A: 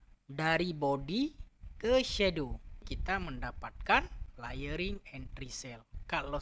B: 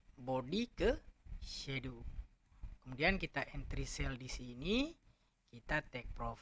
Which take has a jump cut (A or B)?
A